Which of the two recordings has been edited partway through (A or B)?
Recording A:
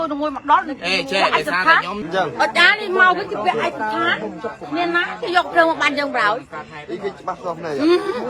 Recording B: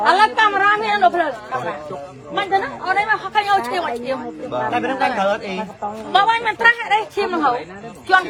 A